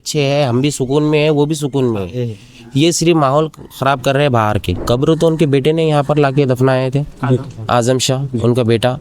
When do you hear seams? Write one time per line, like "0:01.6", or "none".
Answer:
0:04.7